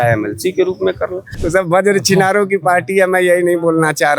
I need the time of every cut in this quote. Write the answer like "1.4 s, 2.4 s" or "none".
1.3 s